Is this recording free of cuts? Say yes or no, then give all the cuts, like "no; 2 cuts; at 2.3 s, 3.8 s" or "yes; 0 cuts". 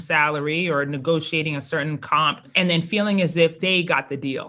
no; 2 cuts; at 2.5 s, 3.6 s